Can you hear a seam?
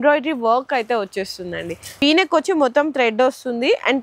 yes; 1 cut; at 1.8 s

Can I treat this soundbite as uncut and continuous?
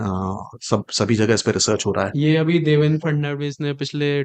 yes; 0 cuts

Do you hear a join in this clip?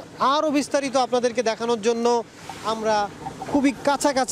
no; 0 cuts

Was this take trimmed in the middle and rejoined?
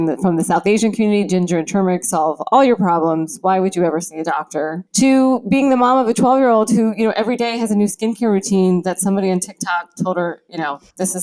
yes; 1 cut; at 4.8 s

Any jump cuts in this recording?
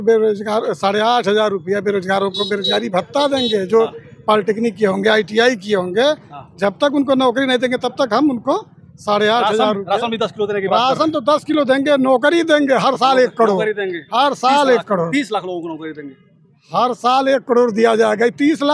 no; 0 cuts

